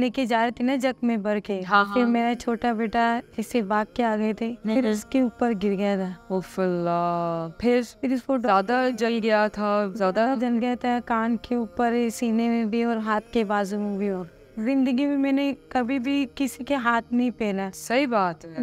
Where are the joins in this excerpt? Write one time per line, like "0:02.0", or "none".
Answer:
0:04.6
0:06.2
0:07.9
0:14.5